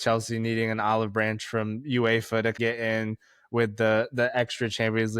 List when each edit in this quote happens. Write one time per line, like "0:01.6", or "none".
0:02.6